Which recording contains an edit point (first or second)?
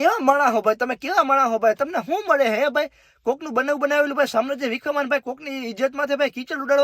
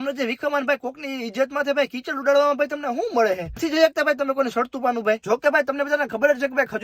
second